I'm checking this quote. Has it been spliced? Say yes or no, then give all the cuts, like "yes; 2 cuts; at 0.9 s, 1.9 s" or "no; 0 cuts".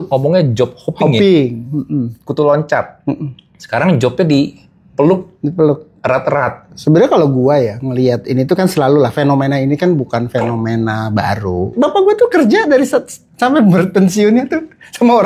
yes; 2 cuts; at 6.7 s, 11.7 s